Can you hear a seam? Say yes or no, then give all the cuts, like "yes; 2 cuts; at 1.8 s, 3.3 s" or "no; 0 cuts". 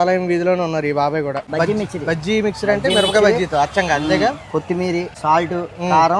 yes; 2 cuts; at 1.5 s, 5.1 s